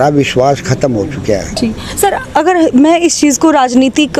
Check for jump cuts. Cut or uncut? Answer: uncut